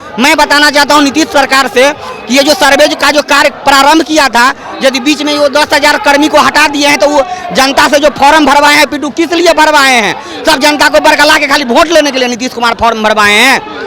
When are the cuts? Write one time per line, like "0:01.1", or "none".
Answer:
none

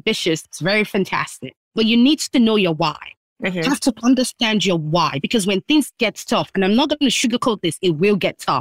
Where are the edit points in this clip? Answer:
0:03.3

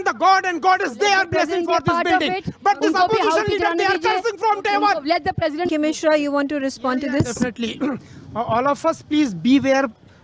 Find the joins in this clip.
0:05.7

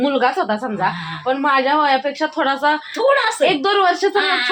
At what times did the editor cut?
none

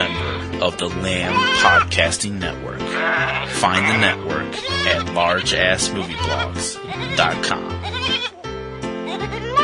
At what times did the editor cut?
none

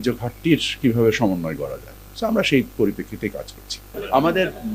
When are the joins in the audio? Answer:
0:03.5

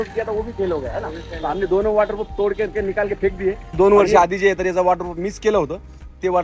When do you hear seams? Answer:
0:03.7

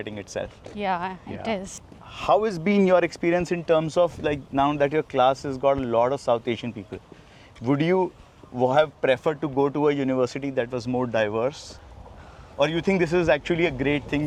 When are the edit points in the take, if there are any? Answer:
none

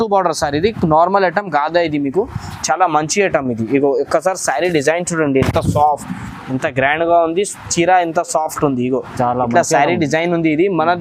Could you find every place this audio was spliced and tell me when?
none

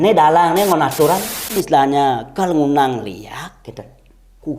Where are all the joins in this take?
0:01.6

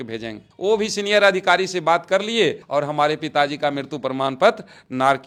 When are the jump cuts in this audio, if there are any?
none

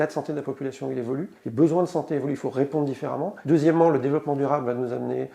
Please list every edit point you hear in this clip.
0:01.3
0:03.4

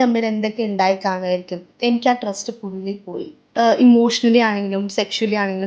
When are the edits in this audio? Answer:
0:03.4

